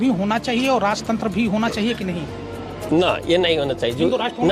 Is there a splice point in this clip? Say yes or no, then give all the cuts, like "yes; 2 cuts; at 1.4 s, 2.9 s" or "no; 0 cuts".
no; 0 cuts